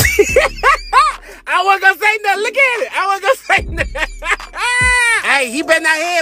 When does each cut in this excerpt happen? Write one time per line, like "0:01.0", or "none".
0:05.2